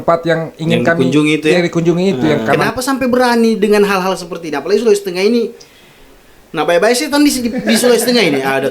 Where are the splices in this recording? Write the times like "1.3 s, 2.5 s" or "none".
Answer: 2.6 s